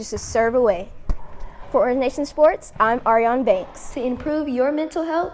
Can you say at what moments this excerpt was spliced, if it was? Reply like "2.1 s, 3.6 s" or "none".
3.8 s